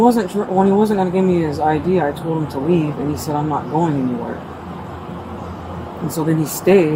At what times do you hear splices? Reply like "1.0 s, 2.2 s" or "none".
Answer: none